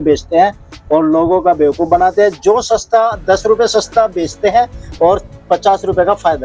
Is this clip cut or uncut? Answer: uncut